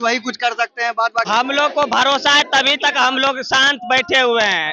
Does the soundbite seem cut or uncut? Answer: cut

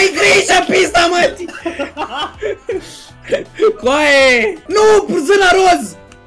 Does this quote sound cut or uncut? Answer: cut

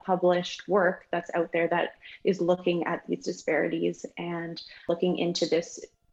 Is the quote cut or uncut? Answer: cut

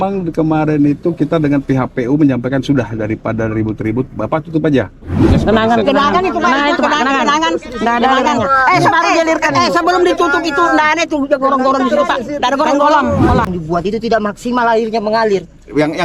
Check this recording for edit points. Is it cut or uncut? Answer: cut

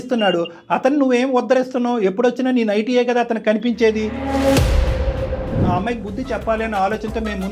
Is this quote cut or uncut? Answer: cut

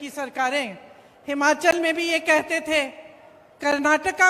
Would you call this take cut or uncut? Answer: uncut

